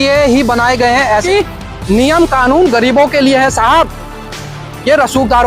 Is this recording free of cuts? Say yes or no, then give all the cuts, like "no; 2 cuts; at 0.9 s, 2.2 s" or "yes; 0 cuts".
no; 1 cut; at 1.2 s